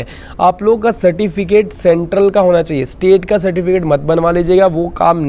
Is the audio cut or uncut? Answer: uncut